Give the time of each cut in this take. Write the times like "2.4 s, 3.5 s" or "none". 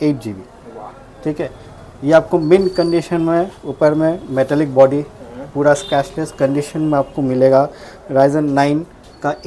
none